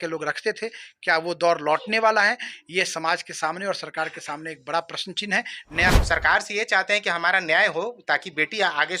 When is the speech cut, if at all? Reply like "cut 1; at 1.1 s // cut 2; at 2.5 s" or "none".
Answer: cut 1; at 5.9 s